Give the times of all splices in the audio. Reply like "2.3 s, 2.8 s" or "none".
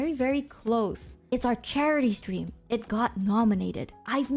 1.2 s